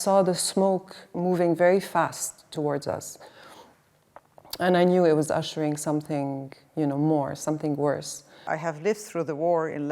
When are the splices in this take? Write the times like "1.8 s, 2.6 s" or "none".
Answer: 8.4 s